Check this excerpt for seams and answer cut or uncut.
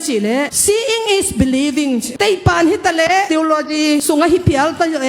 cut